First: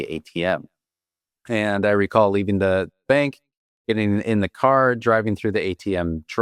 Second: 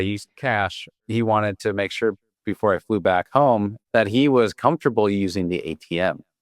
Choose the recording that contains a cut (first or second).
second